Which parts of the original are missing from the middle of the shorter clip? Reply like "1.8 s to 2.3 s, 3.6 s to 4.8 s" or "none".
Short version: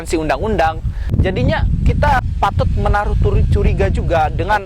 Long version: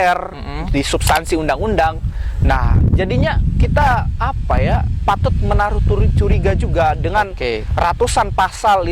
2.2 s to 2.8 s, 3.9 s to 4.9 s